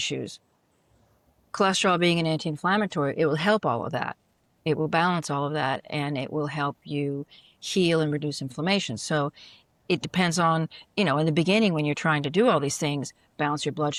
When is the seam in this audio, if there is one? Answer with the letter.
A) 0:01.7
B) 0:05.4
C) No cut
C